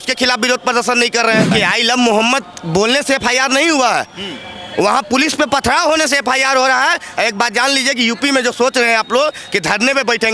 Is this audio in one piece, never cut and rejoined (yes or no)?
no